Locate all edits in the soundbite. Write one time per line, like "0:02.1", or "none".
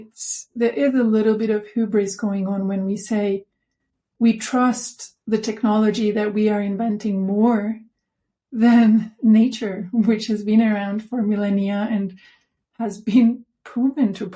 none